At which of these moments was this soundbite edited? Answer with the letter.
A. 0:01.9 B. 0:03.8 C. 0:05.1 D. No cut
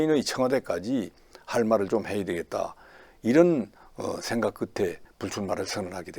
C